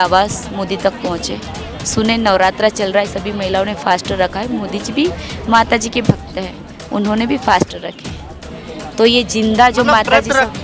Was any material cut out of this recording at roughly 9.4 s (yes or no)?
no